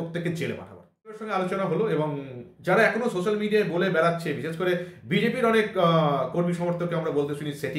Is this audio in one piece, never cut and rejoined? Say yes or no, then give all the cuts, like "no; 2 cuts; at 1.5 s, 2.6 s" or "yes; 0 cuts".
no; 1 cut; at 1.3 s